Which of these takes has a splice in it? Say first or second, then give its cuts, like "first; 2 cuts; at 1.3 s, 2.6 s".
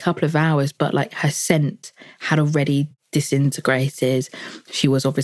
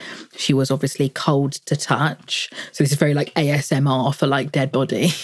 first; 1 cut; at 3.0 s